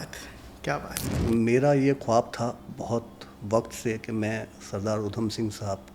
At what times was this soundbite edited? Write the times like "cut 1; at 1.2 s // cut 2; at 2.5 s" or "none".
cut 1; at 1.1 s